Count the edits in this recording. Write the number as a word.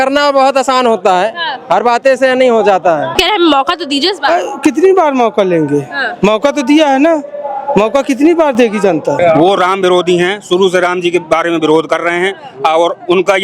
two